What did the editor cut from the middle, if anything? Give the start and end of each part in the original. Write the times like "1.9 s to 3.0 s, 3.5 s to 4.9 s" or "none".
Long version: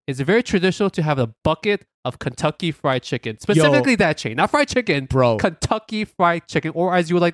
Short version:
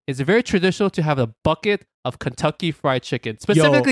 none